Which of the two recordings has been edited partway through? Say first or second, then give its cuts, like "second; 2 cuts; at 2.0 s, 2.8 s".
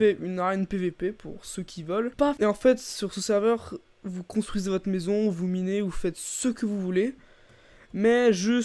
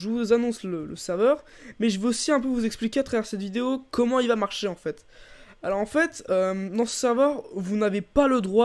first; 1 cut; at 2.2 s